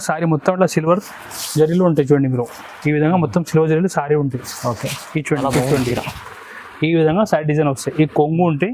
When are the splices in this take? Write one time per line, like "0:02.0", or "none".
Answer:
0:05.2